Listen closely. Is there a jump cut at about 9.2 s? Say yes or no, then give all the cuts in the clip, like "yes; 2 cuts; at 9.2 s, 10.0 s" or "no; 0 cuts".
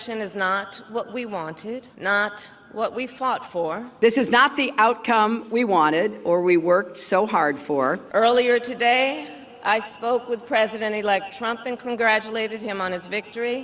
no; 2 cuts; at 1.9 s, 3.9 s